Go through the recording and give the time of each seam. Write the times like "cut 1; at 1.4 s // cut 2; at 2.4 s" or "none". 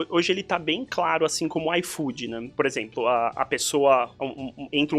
cut 1; at 2.4 s